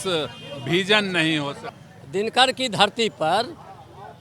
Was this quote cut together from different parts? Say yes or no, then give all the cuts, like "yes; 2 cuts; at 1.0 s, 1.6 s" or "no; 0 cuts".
yes; 1 cut; at 1.7 s